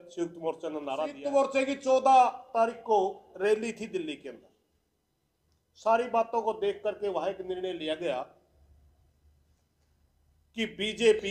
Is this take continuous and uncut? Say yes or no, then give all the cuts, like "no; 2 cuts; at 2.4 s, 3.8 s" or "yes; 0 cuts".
no; 1 cut; at 1.2 s